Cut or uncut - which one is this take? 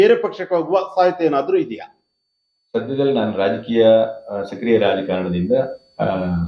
uncut